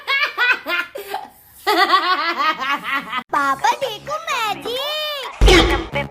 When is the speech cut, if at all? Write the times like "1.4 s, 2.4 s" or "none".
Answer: 3.3 s